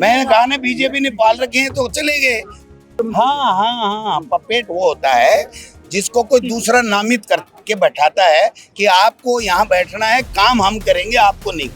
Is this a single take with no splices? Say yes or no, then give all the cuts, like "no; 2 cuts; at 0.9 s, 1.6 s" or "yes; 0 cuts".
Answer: no; 1 cut; at 2.7 s